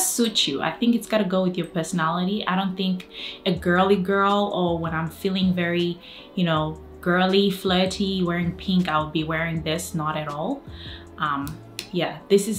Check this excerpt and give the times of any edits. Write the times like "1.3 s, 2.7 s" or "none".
none

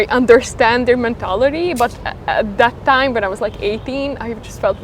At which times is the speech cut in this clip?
none

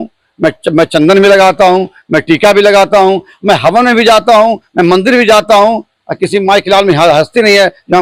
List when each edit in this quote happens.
none

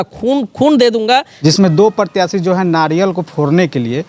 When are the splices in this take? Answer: 1.3 s

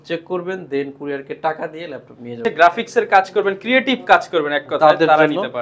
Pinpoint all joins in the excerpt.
2.4 s

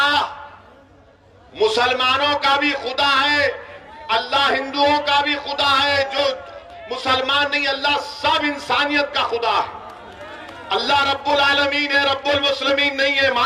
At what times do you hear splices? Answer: none

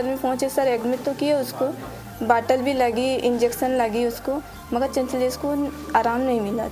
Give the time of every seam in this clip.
none

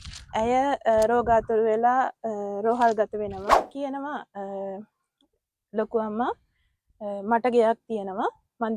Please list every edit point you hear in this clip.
3.7 s

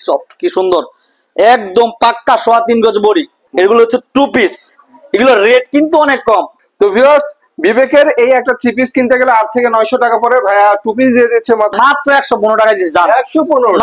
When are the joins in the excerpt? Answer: 3.4 s, 6.6 s, 11.7 s

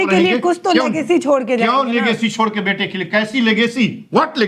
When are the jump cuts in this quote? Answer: none

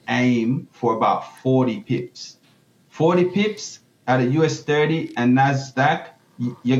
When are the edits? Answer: none

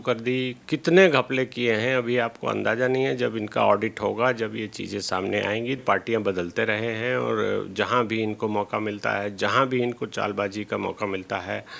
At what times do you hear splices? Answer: 5.8 s

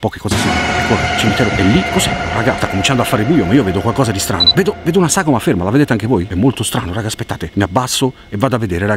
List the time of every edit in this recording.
none

